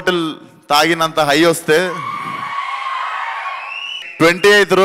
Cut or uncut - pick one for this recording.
cut